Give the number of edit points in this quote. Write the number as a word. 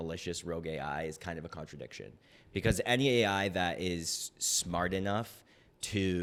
zero